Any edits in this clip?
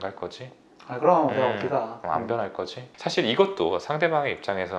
yes; 1 cut; at 2.8 s

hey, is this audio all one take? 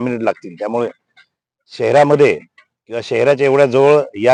yes; 0 cuts

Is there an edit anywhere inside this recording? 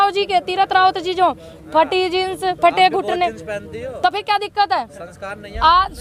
no; 0 cuts

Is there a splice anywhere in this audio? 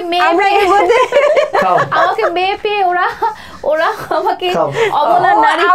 no; 0 cuts

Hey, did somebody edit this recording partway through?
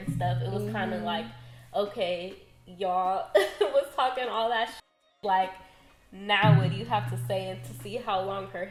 no; 0 cuts

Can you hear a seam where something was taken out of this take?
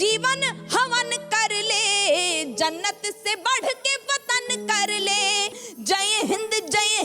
yes; 1 cut; at 5.5 s

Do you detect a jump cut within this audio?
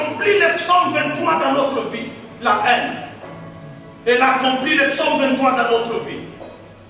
no; 0 cuts

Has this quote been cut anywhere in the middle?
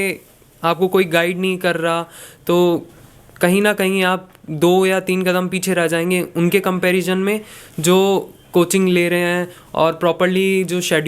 no; 0 cuts

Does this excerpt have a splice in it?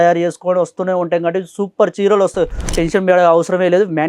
yes; 1 cut; at 2.6 s

